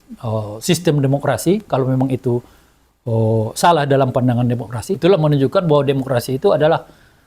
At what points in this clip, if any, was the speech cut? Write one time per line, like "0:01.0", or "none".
0:04.9